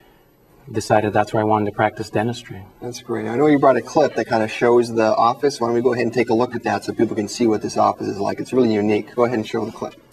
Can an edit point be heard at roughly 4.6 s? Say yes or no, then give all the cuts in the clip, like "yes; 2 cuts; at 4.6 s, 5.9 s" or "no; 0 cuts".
yes; 1 cut; at 4.6 s